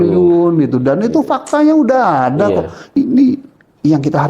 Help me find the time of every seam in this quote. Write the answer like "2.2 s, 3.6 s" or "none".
2.9 s